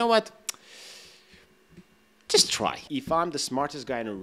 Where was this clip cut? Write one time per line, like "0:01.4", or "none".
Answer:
0:02.8